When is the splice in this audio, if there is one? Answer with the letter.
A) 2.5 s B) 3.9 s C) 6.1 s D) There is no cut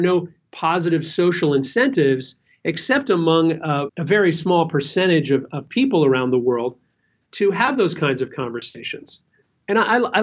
B